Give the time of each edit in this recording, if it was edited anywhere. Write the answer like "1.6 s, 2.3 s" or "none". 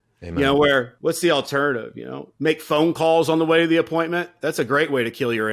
0.9 s